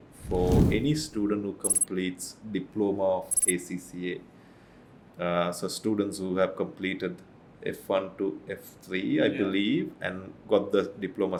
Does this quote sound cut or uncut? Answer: uncut